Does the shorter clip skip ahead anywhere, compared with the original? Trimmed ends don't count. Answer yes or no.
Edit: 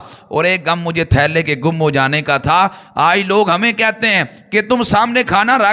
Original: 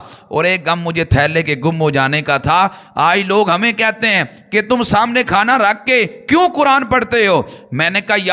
no